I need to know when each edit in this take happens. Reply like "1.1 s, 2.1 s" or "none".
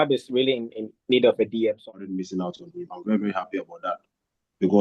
1.9 s